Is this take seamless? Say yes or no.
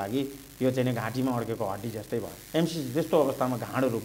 no